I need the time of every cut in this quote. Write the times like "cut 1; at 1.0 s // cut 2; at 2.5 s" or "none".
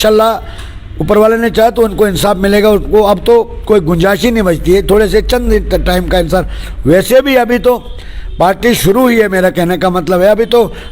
none